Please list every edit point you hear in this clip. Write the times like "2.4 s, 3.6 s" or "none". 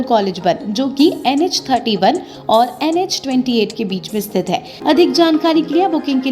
4.7 s